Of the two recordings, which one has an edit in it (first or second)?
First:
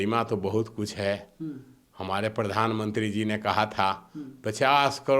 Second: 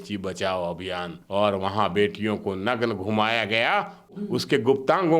second